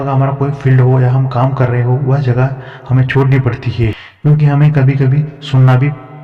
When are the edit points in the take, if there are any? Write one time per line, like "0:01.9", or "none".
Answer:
0:04.1